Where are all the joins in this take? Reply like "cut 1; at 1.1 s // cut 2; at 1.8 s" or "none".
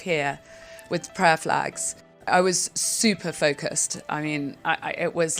cut 1; at 2.2 s